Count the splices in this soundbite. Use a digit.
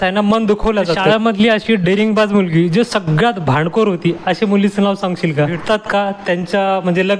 2